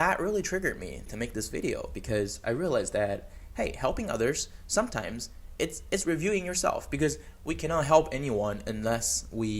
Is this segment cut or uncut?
cut